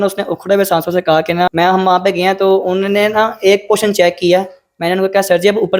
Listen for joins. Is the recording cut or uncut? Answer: cut